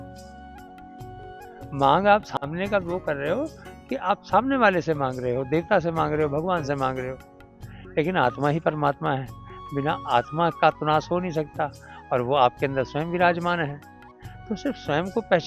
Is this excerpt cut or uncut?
uncut